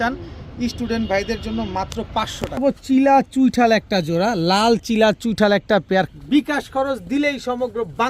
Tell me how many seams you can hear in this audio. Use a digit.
2